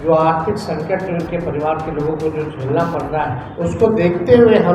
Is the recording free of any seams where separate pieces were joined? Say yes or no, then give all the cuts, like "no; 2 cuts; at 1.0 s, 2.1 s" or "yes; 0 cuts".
no; 1 cut; at 3.5 s